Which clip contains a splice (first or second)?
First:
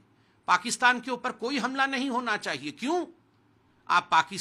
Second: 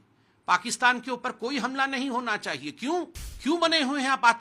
second